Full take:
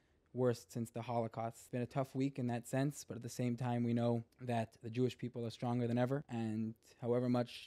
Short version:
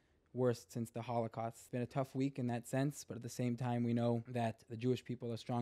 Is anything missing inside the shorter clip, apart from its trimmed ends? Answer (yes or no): yes